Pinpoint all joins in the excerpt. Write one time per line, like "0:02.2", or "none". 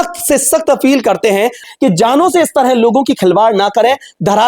0:01.6